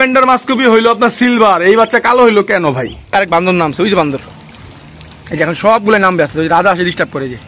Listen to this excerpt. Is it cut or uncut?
cut